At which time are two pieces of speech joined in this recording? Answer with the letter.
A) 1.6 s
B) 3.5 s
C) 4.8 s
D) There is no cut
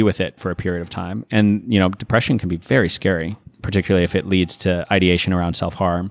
B